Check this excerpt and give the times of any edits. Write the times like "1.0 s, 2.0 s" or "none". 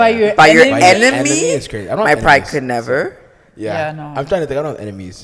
none